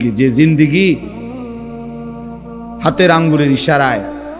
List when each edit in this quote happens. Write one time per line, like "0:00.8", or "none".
none